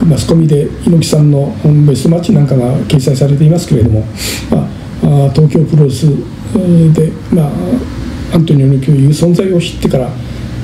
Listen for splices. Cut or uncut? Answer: uncut